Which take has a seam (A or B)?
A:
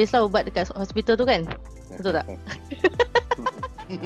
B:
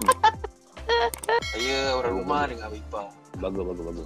B